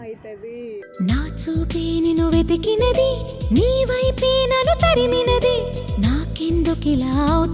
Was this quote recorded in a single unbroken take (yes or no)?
yes